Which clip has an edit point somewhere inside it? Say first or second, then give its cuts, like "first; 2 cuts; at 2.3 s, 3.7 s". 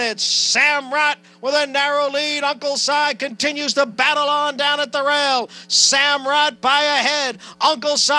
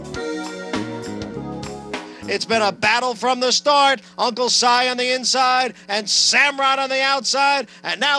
second; 1 cut; at 2.1 s